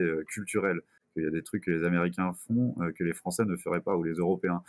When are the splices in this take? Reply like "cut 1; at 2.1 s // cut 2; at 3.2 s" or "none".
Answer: none

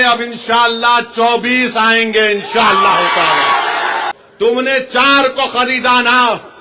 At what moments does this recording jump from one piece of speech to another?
cut 1; at 4.2 s

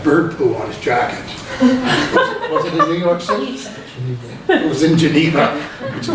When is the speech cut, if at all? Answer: cut 1; at 4.9 s

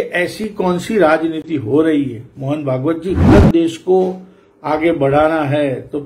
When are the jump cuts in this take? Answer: cut 1; at 3.3 s

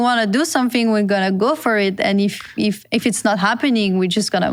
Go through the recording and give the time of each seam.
none

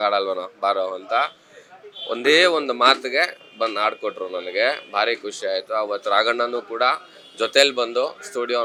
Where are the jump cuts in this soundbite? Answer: none

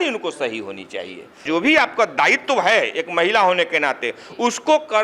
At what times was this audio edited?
cut 1; at 1.4 s

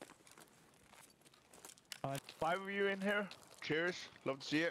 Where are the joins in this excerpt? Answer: cut 1; at 2.2 s

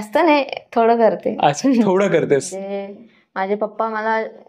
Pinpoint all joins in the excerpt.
cut 1; at 2.5 s

